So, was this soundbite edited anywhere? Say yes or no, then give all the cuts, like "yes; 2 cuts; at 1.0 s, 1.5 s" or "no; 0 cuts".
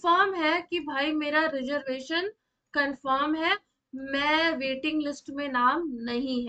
no; 0 cuts